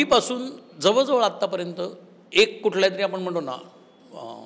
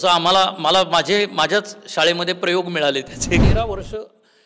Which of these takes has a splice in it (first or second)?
second